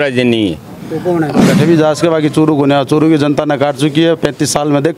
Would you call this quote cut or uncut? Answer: cut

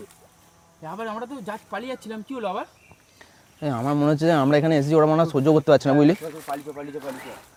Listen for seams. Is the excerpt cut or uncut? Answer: uncut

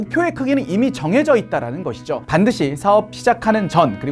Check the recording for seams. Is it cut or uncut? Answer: cut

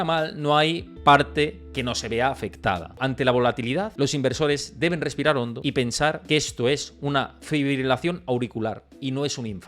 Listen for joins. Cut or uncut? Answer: cut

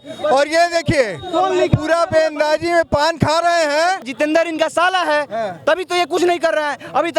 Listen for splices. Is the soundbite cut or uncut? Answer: cut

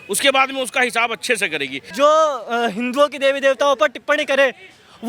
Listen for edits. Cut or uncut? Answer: cut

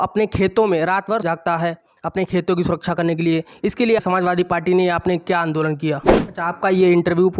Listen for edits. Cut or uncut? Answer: cut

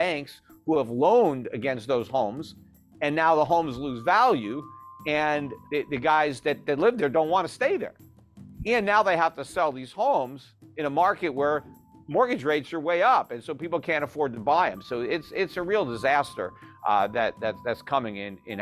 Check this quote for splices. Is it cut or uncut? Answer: cut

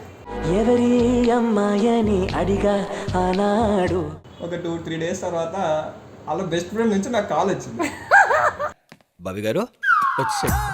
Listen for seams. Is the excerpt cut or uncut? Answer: cut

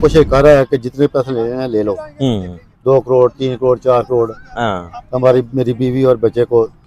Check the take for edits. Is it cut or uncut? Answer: uncut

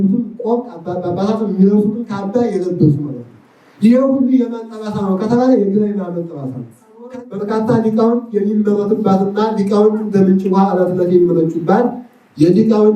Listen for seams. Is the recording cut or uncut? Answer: cut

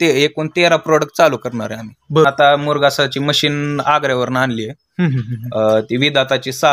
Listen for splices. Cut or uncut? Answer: cut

